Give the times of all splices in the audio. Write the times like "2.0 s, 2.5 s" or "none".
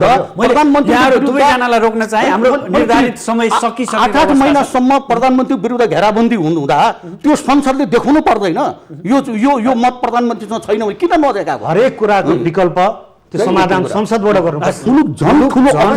14.9 s